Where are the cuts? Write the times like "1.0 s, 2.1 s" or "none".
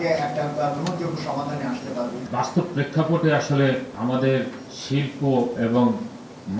2.3 s, 3.9 s